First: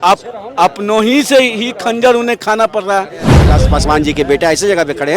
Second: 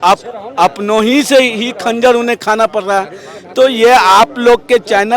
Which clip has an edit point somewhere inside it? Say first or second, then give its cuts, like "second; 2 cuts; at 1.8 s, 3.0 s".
first; 1 cut; at 3.5 s